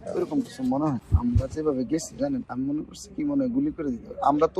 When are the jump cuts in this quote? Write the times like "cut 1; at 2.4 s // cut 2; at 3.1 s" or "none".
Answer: cut 1; at 1.0 s